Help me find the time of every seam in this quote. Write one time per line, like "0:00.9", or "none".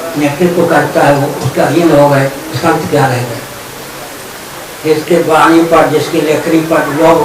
none